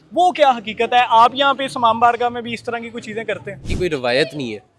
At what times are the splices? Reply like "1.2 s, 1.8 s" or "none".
3.6 s